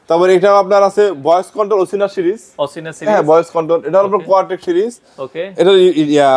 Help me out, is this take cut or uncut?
uncut